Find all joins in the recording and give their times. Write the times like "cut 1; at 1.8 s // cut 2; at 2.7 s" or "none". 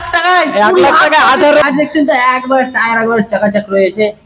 cut 1; at 1.6 s